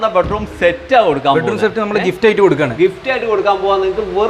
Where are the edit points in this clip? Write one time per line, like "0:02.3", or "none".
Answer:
none